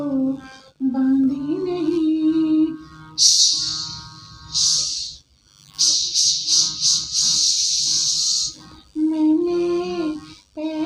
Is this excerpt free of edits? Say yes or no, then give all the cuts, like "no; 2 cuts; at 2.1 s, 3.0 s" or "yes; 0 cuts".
yes; 0 cuts